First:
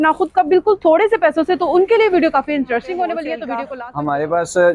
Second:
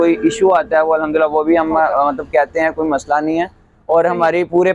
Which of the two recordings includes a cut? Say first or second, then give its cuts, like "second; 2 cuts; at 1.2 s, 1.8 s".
first; 1 cut; at 3.8 s